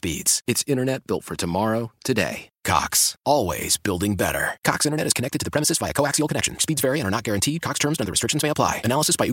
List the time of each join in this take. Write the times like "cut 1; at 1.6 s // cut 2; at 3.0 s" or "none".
none

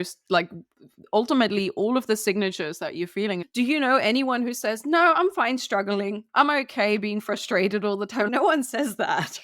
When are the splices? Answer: cut 1; at 3.5 s // cut 2; at 6.3 s // cut 3; at 8.3 s

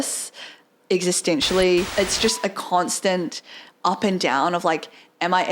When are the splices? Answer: cut 1; at 1.9 s

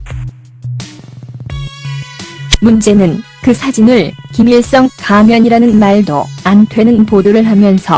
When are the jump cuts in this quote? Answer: cut 1; at 1.0 s

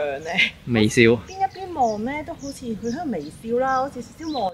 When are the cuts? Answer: cut 1; at 1.3 s

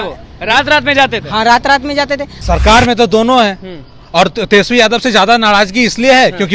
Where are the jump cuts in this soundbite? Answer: cut 1; at 2.4 s

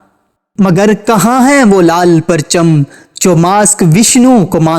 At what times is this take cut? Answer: none

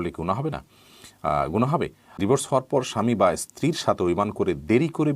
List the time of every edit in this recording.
cut 1; at 2.2 s

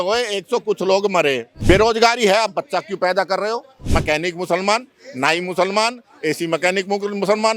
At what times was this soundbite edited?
cut 1; at 1.5 s // cut 2; at 3.8 s

